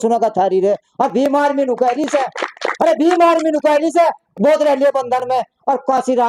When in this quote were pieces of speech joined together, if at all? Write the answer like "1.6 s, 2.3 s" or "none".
none